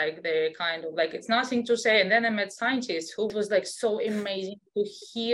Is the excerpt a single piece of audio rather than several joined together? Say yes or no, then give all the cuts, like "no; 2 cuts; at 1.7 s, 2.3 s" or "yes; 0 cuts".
no; 1 cut; at 3.3 s